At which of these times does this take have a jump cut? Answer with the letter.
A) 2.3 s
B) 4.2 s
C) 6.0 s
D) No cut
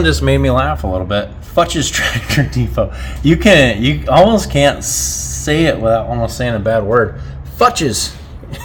D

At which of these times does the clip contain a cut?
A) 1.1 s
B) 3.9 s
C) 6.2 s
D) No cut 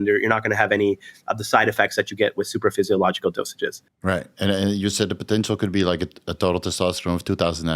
B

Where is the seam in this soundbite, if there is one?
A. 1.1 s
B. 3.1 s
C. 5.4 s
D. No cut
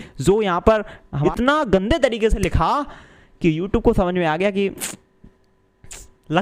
A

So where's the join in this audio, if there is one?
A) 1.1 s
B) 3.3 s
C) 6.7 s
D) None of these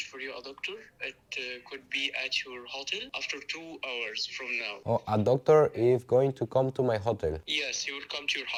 D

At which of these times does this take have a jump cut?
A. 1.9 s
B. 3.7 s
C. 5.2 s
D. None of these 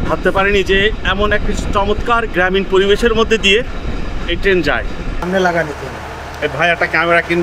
C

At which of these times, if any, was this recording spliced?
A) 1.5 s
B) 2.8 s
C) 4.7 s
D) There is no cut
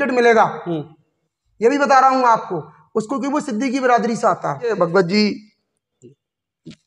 C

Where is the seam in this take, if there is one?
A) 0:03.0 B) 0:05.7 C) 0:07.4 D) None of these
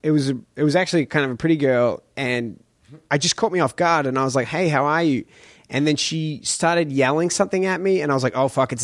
D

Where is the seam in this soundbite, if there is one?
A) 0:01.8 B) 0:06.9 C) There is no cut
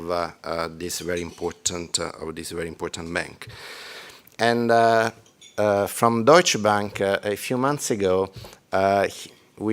B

